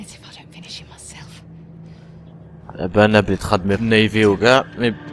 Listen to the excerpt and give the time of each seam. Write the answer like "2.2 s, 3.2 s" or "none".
2.7 s